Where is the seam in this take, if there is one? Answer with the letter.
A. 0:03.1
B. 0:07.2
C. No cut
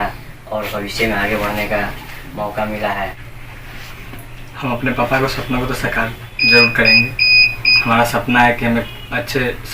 A